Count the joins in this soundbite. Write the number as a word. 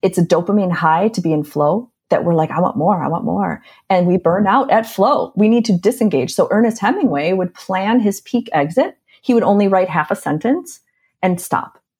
zero